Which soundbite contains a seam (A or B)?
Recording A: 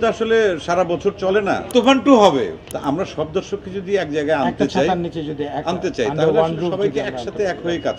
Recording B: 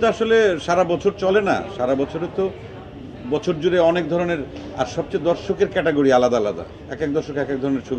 A